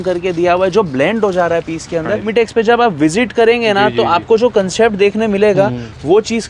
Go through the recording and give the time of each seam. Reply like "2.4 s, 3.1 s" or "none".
2.3 s